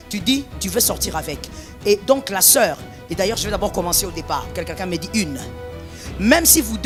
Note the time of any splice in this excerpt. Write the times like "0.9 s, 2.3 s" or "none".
none